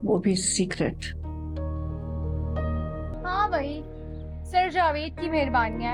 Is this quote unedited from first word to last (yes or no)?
no